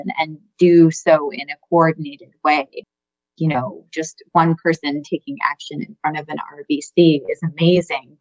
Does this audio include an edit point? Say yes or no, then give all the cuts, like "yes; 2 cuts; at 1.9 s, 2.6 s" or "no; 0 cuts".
no; 0 cuts